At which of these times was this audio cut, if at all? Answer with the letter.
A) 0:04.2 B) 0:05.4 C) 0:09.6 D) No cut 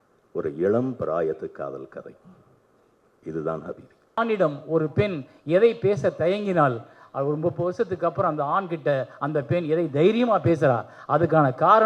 A